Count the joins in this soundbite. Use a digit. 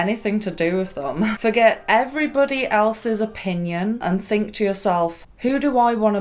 3